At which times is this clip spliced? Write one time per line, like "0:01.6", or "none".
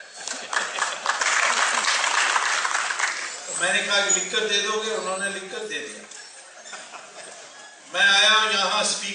0:02.6